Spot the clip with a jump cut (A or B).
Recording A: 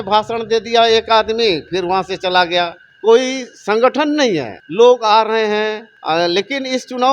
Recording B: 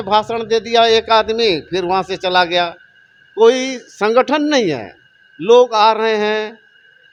A